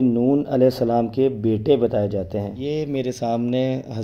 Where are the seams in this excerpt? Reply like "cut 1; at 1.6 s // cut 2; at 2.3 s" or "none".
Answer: cut 1; at 2.5 s